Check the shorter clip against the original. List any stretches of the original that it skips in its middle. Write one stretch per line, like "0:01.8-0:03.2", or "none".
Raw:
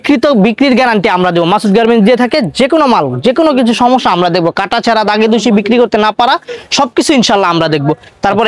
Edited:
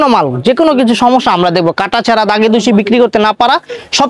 none